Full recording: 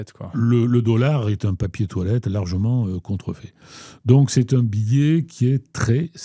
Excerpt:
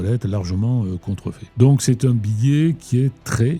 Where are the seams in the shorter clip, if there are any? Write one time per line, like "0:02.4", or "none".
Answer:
0:01.4